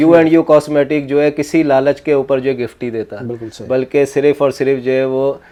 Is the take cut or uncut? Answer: uncut